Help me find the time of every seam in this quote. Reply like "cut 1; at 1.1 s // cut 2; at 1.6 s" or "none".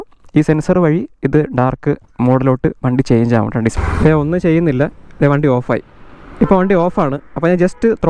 cut 1; at 3.8 s